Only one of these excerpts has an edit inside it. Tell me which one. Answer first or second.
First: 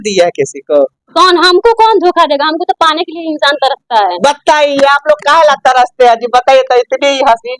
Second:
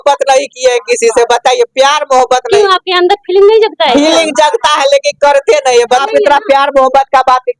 second